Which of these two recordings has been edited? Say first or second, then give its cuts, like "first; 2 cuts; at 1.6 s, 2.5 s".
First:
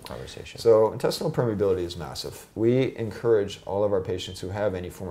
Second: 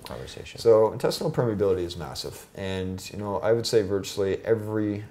first; 1 cut; at 2.4 s